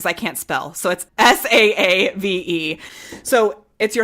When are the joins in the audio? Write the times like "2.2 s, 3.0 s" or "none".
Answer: 1.1 s, 2.6 s

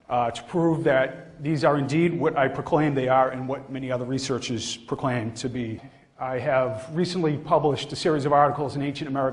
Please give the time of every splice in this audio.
none

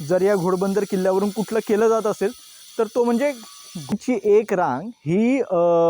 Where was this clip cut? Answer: 3.9 s

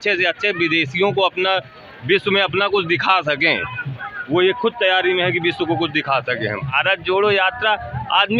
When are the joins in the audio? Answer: 6.7 s

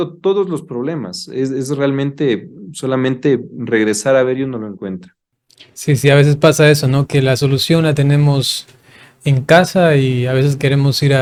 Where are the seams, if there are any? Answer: none

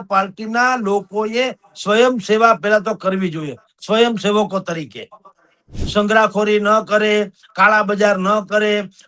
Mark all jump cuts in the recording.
5.8 s

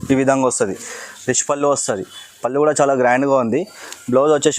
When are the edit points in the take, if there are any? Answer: none

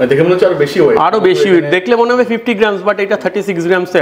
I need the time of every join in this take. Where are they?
none

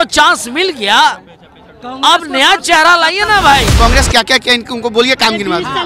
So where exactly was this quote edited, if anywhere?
3.7 s

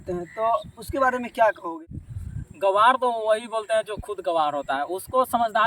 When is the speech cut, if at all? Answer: 1.9 s

